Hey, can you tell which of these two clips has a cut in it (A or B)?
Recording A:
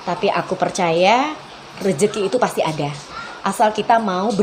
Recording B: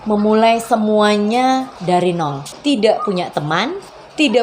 B